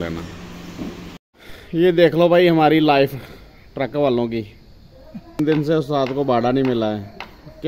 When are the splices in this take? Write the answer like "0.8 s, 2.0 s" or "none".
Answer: 1.3 s, 5.4 s